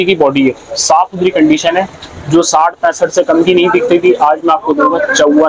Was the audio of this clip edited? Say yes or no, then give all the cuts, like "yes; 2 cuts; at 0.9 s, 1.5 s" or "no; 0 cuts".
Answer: no; 0 cuts